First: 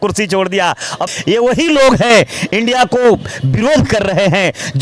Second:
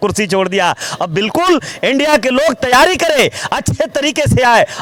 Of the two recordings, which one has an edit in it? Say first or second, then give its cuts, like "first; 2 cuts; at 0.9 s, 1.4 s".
first; 1 cut; at 1.0 s